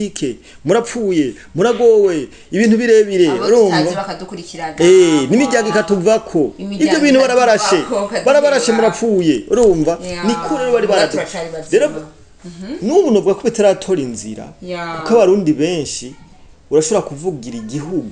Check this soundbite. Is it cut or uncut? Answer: uncut